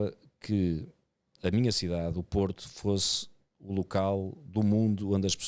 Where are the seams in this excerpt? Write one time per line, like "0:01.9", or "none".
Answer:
none